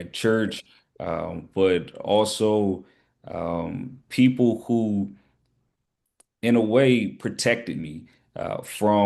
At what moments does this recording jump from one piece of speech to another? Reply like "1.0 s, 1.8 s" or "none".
none